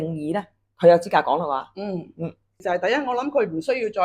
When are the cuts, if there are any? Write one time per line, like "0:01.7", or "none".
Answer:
0:02.6